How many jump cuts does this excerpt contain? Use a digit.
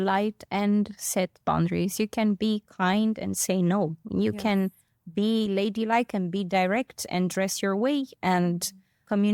0